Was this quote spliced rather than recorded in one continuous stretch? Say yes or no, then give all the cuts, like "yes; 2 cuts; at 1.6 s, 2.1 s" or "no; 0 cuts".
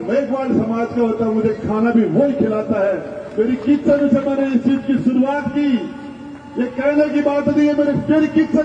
no; 0 cuts